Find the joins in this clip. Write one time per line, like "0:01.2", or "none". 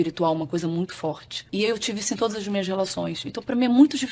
0:01.4